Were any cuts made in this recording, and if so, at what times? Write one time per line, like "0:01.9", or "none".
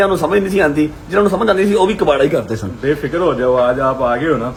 none

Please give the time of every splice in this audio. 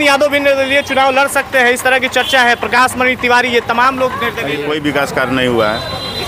0:04.6

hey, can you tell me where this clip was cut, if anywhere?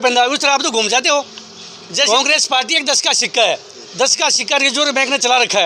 0:01.9

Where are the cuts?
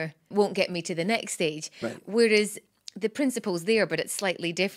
none

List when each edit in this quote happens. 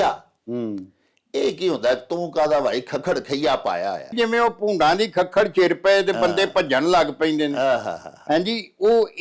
0:04.1

